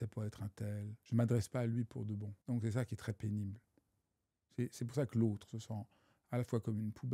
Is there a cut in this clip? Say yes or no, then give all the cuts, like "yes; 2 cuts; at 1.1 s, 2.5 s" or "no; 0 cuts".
yes; 2 cuts; at 0.9 s, 2.3 s